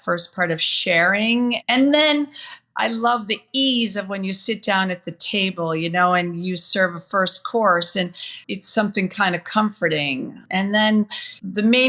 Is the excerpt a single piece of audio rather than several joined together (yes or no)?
no